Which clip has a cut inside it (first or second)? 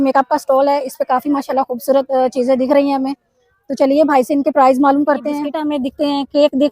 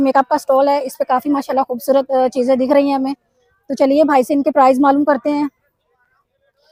first